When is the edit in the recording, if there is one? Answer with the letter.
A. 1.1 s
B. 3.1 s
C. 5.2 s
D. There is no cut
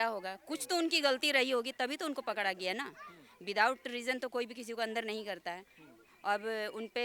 D